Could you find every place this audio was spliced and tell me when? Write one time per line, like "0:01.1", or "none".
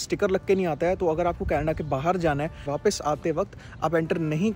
0:02.7